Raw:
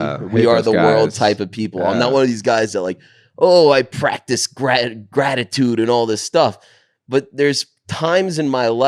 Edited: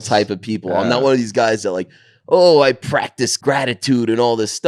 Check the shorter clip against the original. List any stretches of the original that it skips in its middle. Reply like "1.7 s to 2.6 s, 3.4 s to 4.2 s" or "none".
4.4 s to 5.0 s

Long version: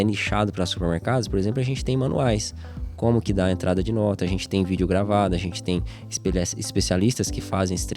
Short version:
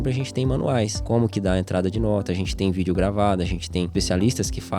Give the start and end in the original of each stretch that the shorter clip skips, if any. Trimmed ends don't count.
2.5 s to 2.9 s, 5.8 s to 6.7 s

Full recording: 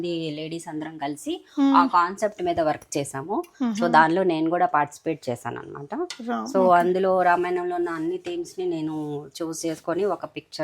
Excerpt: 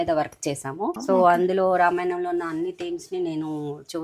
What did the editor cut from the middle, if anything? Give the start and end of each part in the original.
3.5 s to 6.5 s

